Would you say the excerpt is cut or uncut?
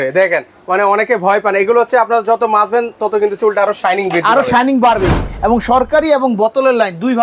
cut